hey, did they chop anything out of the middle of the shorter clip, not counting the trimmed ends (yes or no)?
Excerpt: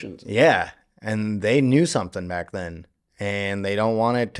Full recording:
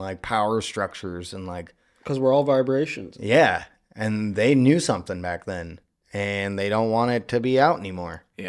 no